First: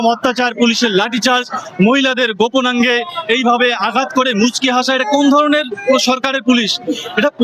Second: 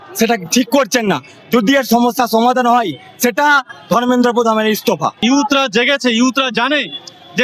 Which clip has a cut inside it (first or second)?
second